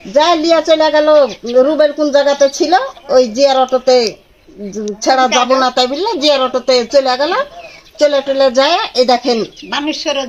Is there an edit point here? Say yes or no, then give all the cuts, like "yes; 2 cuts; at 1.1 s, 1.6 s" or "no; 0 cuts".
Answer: no; 0 cuts